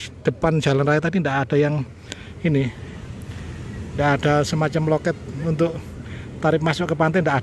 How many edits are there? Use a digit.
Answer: 0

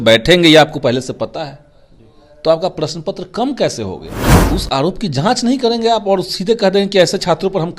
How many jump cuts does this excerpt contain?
1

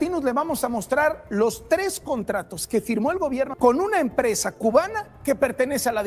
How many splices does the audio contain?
1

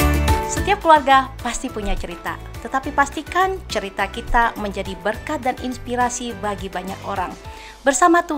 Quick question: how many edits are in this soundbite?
0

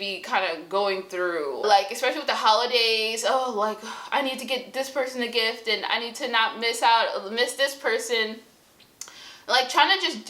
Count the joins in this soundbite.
1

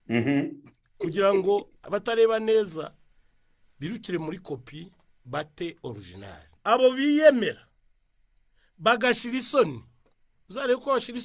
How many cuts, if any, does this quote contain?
2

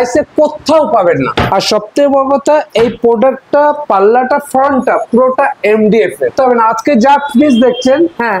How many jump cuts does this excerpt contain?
2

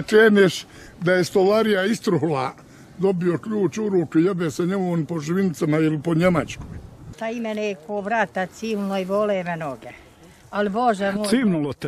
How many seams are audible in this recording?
1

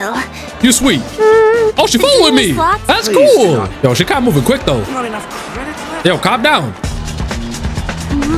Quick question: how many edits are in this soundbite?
1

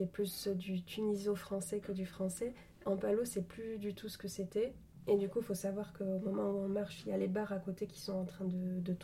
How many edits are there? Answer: 2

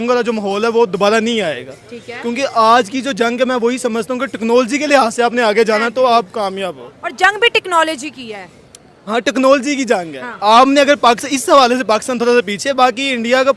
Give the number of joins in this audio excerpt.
0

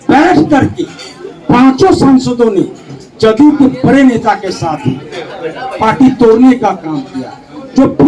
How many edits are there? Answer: 0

